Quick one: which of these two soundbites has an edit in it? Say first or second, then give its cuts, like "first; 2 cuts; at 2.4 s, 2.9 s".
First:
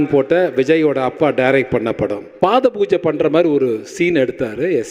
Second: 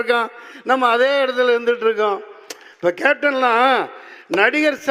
first; 1 cut; at 2.2 s